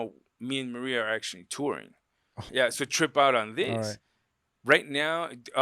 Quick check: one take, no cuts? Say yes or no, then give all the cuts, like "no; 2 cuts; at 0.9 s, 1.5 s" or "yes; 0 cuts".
no; 1 cut; at 2.5 s